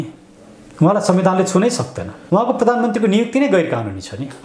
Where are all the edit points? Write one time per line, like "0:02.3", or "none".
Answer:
0:02.1

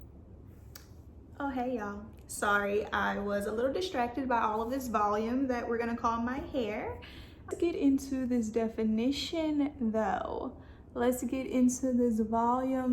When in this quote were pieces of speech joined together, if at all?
0:07.5

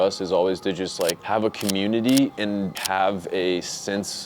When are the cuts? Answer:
0:02.8

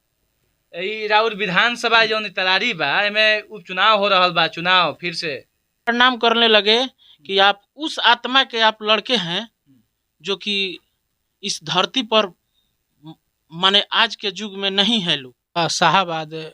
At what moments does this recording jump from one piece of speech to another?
0:05.9
0:15.6

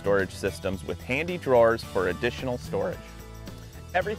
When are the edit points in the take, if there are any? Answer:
0:03.0

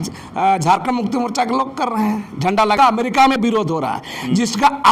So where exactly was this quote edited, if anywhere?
0:02.8

